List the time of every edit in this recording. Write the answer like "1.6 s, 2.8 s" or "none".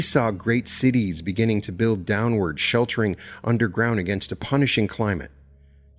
none